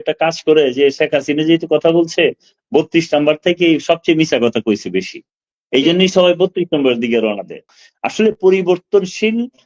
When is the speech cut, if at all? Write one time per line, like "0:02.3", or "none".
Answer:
0:07.7